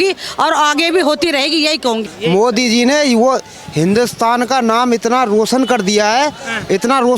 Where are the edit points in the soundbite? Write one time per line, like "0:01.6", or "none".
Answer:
0:02.0

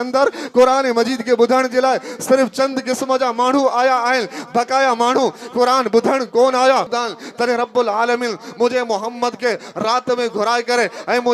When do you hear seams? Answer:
0:06.9

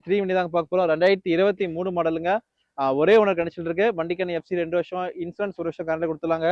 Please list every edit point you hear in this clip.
none

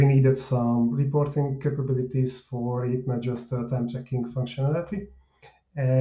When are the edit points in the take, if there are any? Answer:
none

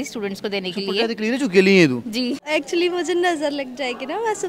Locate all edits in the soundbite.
0:02.4

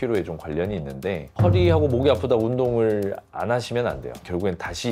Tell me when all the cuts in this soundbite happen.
0:01.3

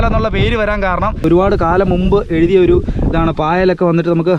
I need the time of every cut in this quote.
0:01.2

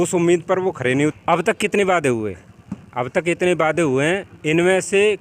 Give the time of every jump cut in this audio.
0:01.1

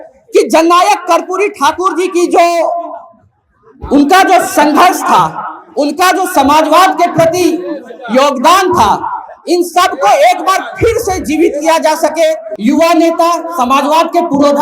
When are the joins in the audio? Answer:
0:12.5

